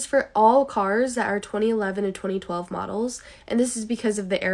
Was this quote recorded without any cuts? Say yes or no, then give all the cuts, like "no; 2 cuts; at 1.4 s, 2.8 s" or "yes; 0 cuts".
yes; 0 cuts